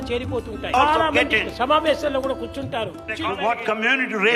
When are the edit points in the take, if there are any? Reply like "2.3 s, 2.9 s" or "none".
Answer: 3.0 s

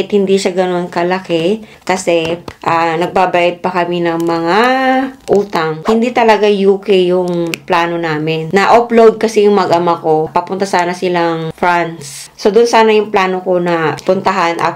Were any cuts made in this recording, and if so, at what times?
5.8 s, 12.3 s

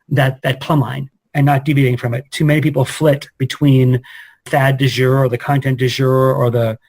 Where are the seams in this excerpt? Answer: 4.4 s

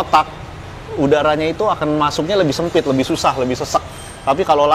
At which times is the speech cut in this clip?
none

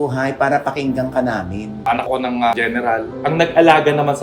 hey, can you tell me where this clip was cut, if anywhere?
2.0 s, 3.2 s

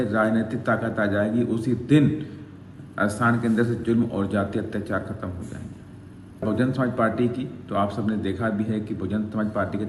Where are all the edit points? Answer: 6.4 s

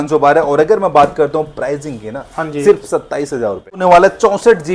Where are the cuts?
3.8 s

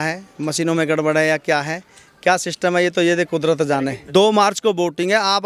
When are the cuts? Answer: 4.0 s

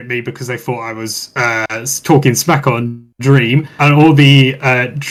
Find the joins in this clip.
none

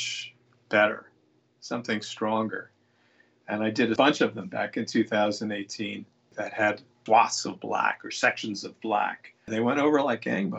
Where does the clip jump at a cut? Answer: 9.4 s

